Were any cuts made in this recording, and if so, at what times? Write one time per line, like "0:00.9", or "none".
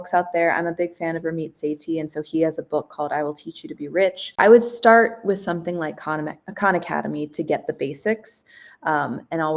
0:04.4